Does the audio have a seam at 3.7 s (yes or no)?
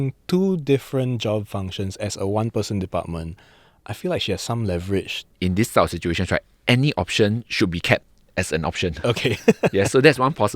no